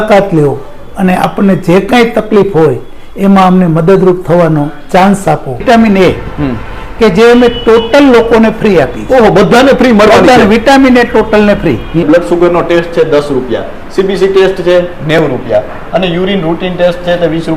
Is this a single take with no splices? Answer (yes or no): no